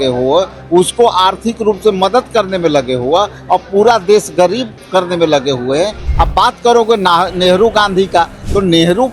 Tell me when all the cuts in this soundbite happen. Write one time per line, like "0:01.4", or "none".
0:06.0